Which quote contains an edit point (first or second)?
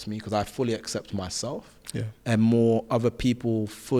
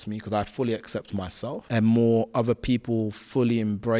second